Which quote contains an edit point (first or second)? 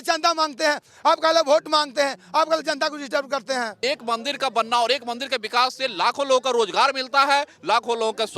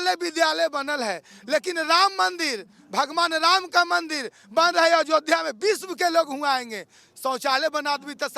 first